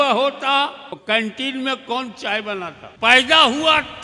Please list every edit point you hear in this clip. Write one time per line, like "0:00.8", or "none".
0:01.0
0:02.8

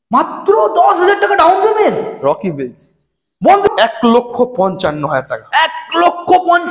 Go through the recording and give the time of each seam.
0:03.7

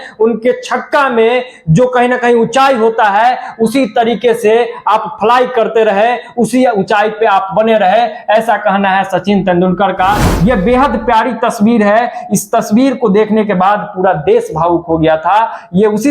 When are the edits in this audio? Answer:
0:10.3

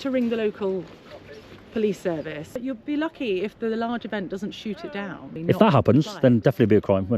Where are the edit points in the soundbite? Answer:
0:02.5
0:05.4

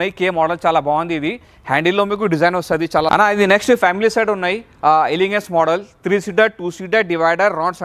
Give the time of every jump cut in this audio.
0:03.1

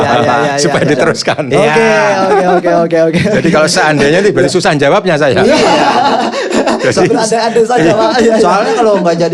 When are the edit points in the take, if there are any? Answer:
none

